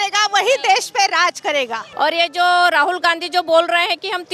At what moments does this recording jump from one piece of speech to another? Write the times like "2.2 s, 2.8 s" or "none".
1.8 s